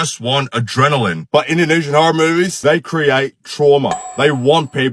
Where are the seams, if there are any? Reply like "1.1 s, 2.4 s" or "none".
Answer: none